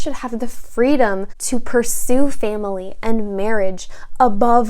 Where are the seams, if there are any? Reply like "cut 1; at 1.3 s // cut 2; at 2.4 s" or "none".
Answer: cut 1; at 1.3 s